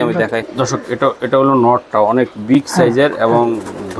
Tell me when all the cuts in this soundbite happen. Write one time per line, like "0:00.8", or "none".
none

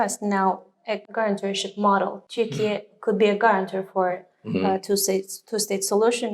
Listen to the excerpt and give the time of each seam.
0:01.0
0:02.2

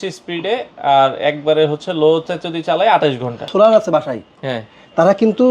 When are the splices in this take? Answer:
0:03.5

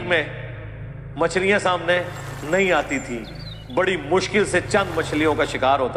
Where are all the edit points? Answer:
none

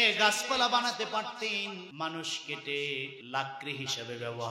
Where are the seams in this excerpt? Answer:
0:01.9
0:03.2

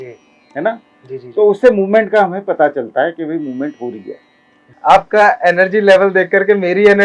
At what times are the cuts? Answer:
0:04.7

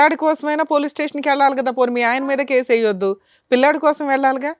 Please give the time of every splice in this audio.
none

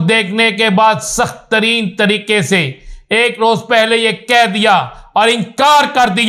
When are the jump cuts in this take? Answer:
none

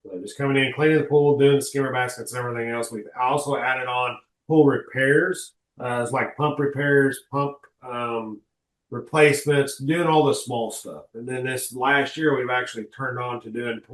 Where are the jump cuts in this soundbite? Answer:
none

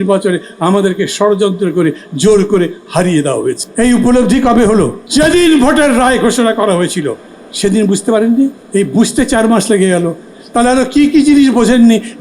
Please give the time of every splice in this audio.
0:03.6
0:05.0
0:08.6

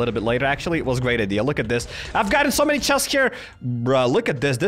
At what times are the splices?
none

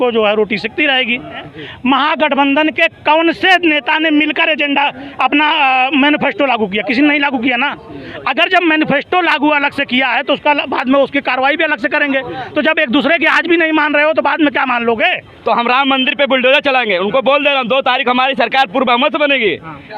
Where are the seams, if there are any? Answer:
0:01.5
0:15.3

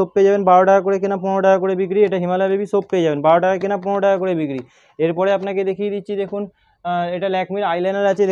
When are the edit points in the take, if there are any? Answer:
none

